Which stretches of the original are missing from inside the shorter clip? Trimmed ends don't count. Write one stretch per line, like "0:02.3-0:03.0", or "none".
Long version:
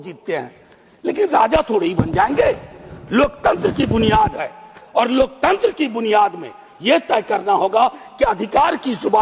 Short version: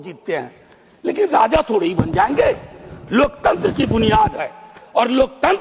none

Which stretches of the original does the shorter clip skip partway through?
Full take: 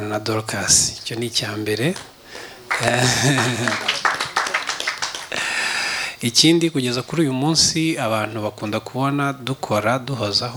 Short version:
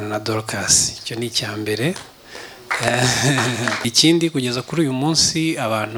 0:03.8-0:06.2

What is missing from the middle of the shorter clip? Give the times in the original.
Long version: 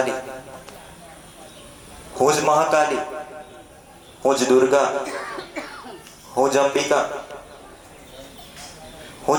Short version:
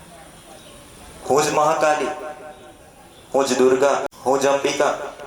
0:05.0-0:06.2

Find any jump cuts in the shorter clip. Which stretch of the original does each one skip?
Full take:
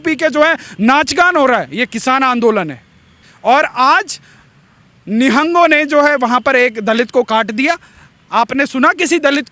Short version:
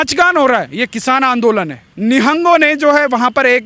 0:02.8-0:04.9

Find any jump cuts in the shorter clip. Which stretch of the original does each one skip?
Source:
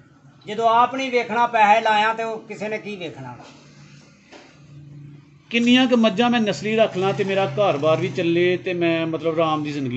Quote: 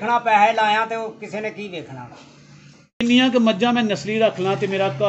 0:04.3-0:05.6

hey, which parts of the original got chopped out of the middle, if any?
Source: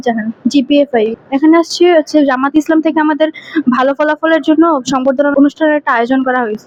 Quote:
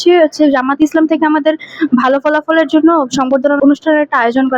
none

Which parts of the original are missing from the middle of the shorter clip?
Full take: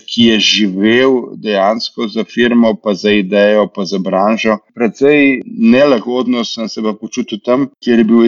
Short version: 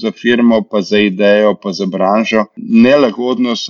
0:04.7-0:05.5

